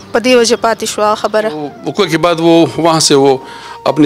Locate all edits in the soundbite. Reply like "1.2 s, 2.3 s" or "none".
1.8 s

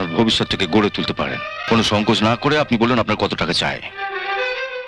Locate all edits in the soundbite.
1.6 s

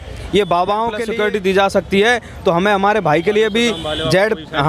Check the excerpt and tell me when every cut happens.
1.0 s

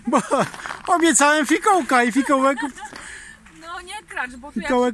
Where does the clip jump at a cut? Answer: none

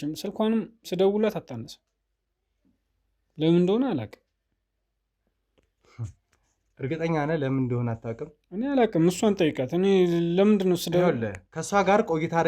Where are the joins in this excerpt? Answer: none

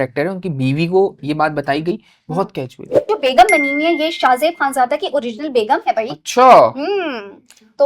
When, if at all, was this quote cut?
3.0 s

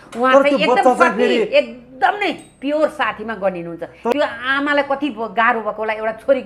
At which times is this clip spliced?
4.1 s

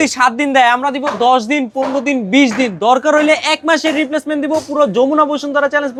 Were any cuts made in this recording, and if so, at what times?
none

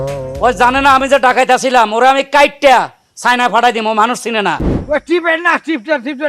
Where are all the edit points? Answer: 4.7 s

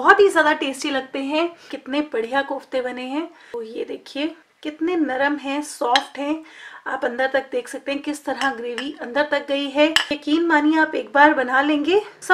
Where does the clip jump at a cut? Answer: 1.7 s

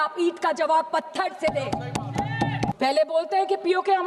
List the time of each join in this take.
2.7 s

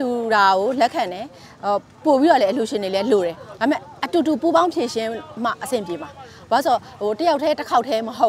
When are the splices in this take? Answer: none

